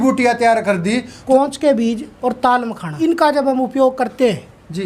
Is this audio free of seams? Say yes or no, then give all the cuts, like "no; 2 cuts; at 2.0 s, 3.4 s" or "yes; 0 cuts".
no; 3 cuts; at 1.2 s, 2.1 s, 2.9 s